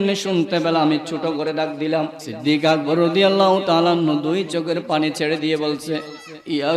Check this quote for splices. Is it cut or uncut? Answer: cut